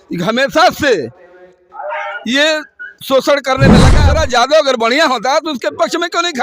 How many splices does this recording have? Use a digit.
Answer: 1